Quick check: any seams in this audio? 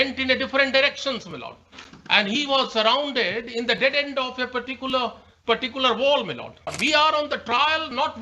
yes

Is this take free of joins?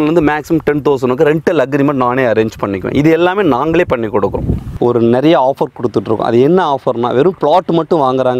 no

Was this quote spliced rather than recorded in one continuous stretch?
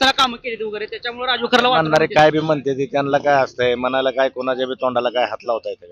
no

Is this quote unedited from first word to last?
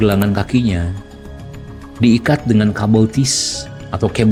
yes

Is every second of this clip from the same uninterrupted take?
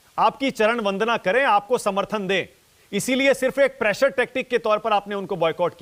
yes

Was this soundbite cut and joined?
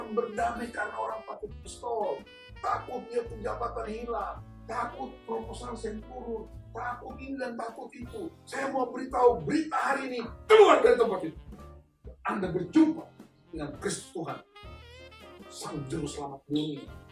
no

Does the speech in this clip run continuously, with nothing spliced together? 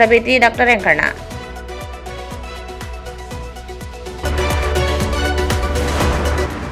yes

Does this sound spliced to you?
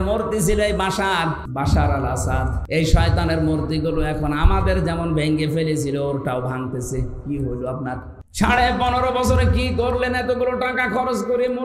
yes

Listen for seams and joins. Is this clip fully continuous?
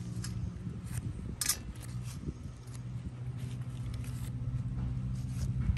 yes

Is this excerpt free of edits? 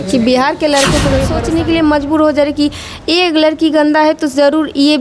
no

